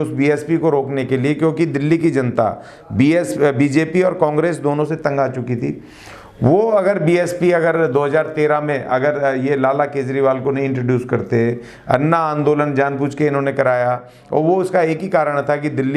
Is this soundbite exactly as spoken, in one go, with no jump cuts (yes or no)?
yes